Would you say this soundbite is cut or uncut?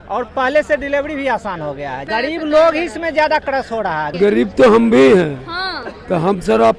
cut